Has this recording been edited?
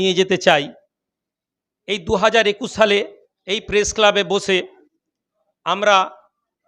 no; 0 cuts

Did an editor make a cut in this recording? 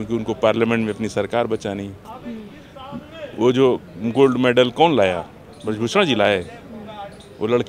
no; 0 cuts

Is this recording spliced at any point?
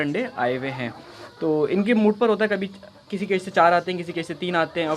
no; 0 cuts

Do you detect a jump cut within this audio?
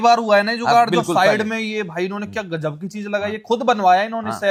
no; 0 cuts

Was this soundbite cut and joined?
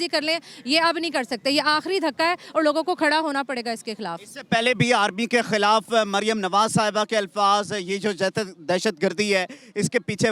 no; 0 cuts

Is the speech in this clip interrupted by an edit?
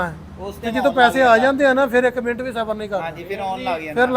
no; 0 cuts

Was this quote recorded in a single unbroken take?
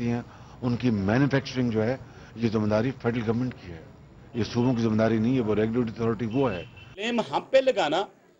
no; 1 cut; at 7.1 s

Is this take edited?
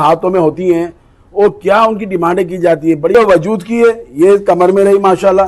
yes; 1 cut; at 3.1 s

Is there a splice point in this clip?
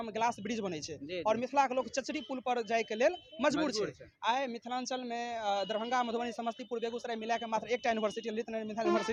no; 0 cuts

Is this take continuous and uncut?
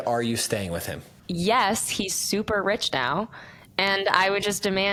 yes; 0 cuts

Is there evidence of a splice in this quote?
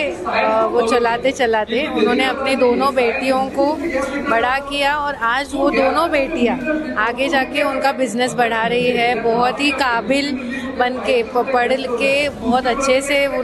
no; 0 cuts

